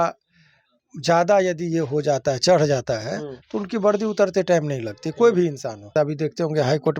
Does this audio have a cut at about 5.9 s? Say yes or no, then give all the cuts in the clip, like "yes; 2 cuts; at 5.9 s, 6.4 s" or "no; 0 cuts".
yes; 1 cut; at 5.9 s